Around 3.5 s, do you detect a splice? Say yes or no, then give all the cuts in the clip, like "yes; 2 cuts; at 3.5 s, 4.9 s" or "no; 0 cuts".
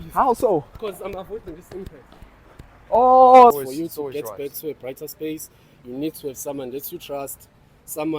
yes; 1 cut; at 3.5 s